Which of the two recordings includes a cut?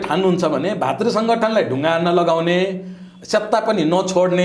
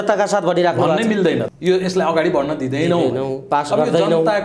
second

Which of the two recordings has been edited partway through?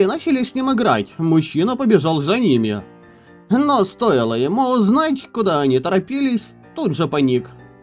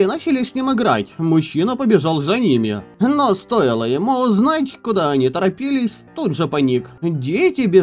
second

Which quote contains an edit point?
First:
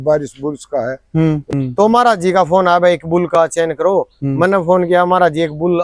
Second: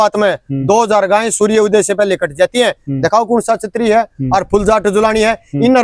first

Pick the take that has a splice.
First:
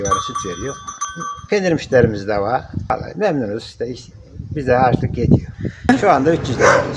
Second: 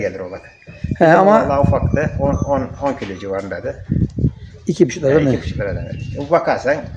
first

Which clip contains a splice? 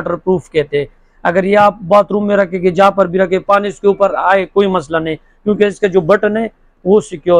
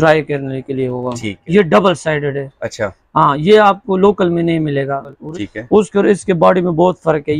second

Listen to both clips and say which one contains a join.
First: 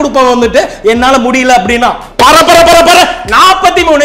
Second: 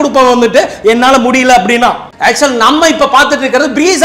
first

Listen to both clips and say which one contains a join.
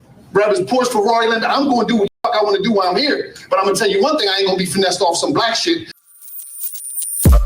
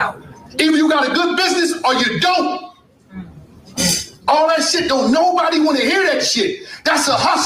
first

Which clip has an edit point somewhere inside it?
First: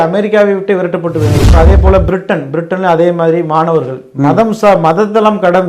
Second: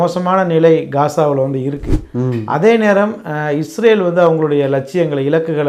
first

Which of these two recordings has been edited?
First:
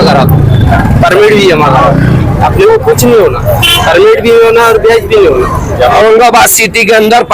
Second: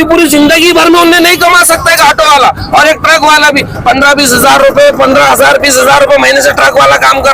first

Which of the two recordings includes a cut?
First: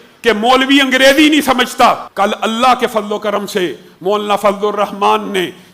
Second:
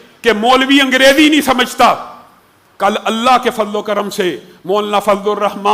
first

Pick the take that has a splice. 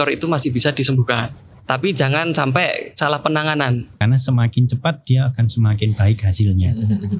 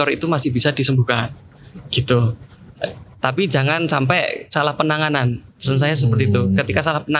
first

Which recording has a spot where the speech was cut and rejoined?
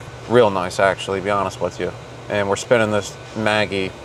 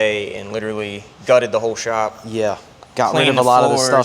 second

